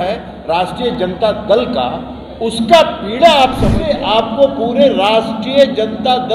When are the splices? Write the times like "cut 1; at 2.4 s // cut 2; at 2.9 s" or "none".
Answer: cut 1; at 3.7 s